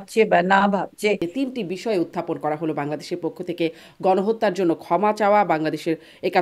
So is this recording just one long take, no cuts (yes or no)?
no